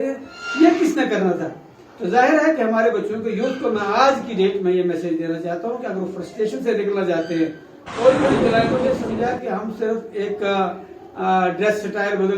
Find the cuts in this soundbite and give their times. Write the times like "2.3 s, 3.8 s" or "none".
8.7 s